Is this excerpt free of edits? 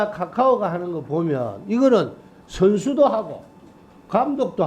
yes; 0 cuts

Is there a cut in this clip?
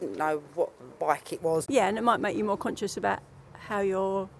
yes; 1 cut; at 1.6 s

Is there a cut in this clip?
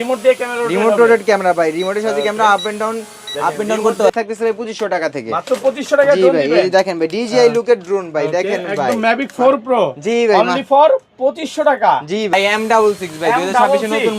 yes; 2 cuts; at 4.1 s, 12.3 s

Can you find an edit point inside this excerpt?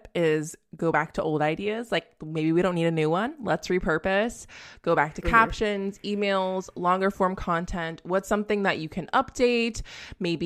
no; 0 cuts

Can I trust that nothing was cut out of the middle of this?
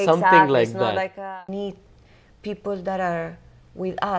no; 1 cut; at 1.3 s

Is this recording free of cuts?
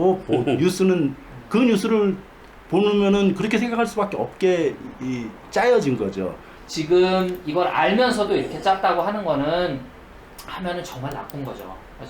no; 1 cut; at 6.5 s

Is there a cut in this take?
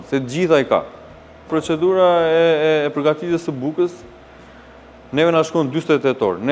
no; 0 cuts

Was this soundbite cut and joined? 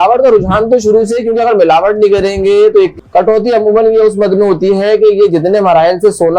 yes; 1 cut; at 2.9 s

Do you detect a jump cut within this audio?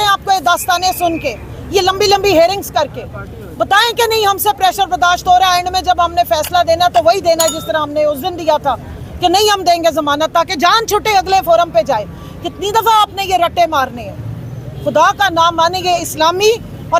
no; 0 cuts

